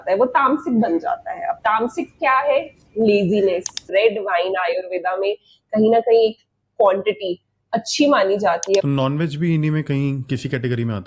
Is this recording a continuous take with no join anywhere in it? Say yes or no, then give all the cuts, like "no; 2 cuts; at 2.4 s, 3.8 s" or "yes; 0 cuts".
no; 2 cuts; at 3.9 s, 8.8 s